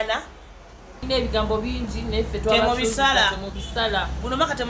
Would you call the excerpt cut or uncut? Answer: cut